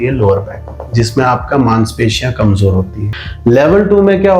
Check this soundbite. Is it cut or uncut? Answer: cut